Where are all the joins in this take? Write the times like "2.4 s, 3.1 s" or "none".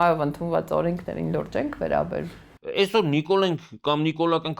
2.5 s